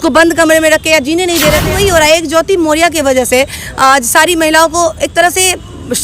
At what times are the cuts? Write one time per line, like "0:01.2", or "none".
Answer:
0:01.6

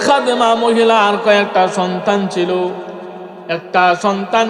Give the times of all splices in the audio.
none

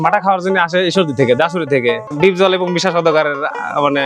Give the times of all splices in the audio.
0:02.1

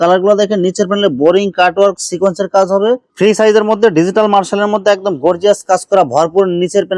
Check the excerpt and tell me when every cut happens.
0:03.1

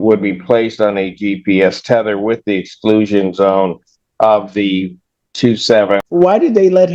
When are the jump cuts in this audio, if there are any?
0:06.0

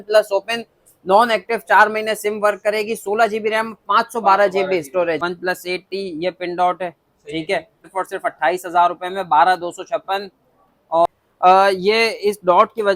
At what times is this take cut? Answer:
0:05.2
0:07.8
0:11.1

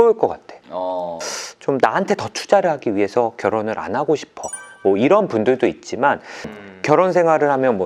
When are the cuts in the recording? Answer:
0:01.2
0:06.4

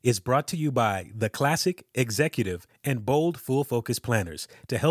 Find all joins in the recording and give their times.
none

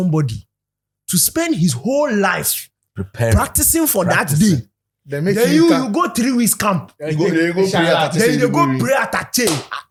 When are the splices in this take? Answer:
none

